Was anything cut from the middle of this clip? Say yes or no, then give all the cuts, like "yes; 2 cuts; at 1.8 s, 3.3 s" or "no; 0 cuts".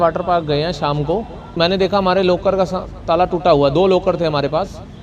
yes; 1 cut; at 1.4 s